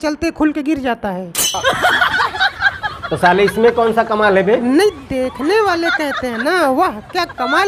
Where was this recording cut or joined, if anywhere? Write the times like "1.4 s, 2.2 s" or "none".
none